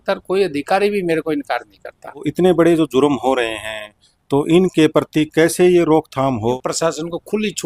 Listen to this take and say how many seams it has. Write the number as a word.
two